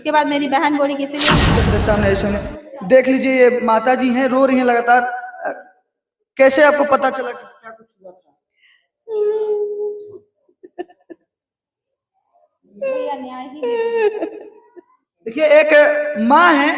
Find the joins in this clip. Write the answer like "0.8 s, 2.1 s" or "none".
1.5 s